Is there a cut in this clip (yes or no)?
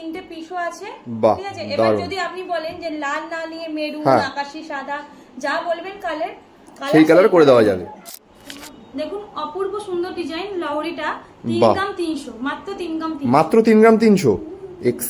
yes